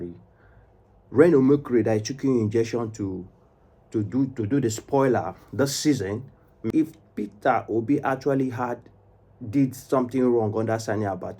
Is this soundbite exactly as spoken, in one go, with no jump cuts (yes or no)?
no